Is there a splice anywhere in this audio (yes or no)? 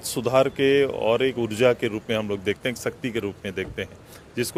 no